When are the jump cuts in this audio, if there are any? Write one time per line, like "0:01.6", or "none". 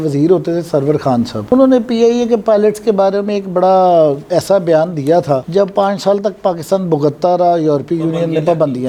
none